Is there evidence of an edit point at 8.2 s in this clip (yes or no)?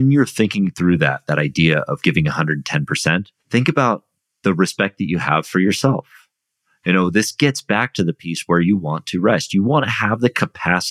no